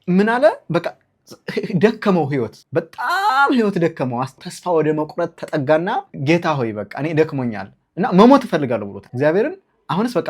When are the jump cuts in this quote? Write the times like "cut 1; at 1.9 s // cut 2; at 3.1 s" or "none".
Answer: cut 1; at 2.6 s // cut 2; at 4.4 s // cut 3; at 6.1 s // cut 4; at 9.0 s